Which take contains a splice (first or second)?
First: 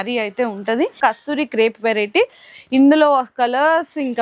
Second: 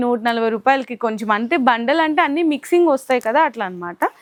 first